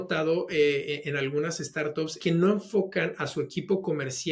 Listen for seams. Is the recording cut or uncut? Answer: cut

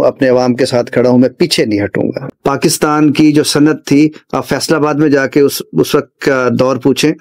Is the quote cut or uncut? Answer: cut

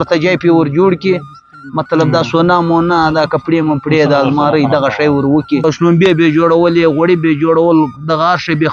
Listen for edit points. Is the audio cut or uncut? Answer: cut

